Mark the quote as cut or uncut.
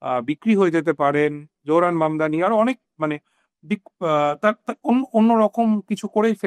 uncut